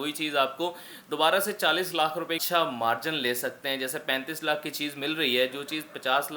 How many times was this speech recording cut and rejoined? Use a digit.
1